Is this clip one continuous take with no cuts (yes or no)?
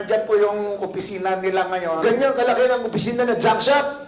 yes